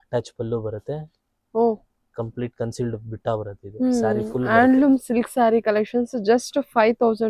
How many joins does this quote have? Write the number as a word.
zero